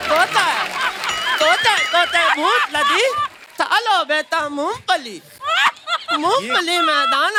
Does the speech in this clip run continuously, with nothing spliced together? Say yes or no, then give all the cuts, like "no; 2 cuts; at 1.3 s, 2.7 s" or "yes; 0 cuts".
yes; 0 cuts